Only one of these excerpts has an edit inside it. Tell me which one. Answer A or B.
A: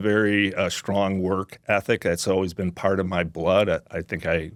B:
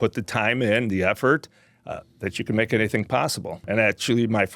B